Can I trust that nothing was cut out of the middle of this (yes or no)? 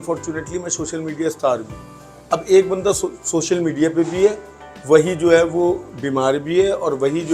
yes